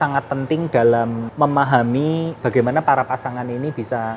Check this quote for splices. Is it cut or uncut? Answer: cut